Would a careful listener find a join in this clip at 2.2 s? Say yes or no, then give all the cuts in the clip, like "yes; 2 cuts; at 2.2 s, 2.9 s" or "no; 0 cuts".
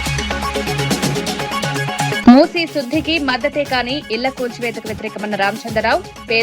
yes; 1 cut; at 2.2 s